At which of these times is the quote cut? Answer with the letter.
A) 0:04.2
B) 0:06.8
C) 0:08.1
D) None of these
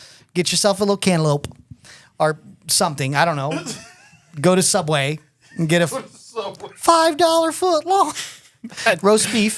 D